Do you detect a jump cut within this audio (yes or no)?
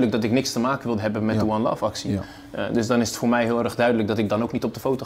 no